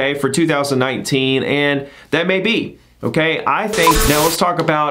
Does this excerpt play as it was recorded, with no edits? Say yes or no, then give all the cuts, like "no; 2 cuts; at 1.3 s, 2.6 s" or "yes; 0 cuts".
no; 1 cut; at 4.0 s